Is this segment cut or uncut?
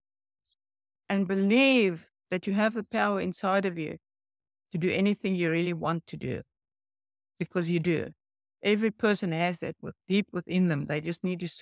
uncut